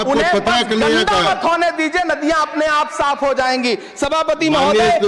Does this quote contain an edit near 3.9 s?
no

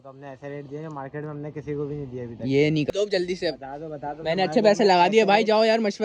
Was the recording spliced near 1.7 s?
no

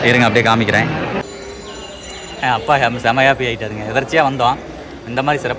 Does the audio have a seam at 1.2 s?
yes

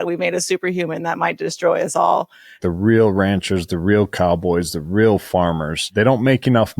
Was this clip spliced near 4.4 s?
no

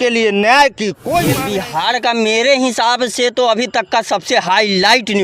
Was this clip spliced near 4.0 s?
no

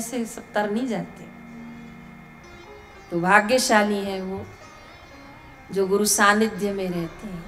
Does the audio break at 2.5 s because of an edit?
yes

